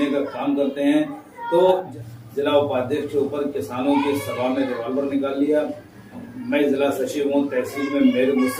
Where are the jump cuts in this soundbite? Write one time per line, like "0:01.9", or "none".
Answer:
0:01.9